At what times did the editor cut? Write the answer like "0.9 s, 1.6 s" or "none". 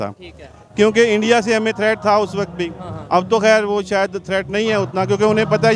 none